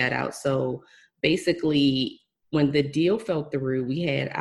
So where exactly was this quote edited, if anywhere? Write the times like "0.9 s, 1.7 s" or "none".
none

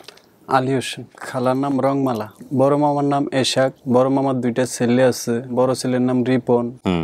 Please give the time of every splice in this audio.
1.0 s, 2.3 s, 3.8 s, 5.5 s

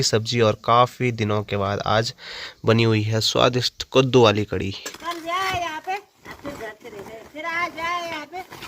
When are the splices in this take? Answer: 4.9 s

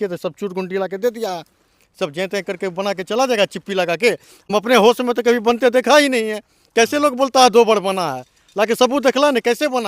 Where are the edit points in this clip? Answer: 4.3 s

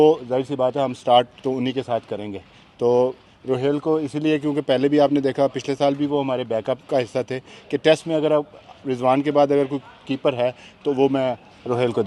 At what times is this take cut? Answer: none

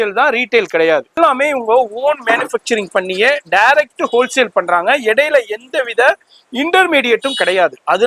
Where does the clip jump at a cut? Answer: 1.2 s

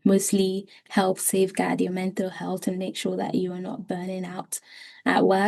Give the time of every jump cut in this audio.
none

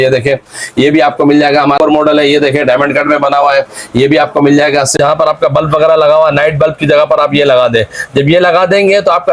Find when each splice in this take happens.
1.8 s, 4.9 s

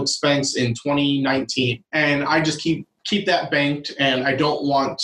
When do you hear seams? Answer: 1.8 s, 2.9 s

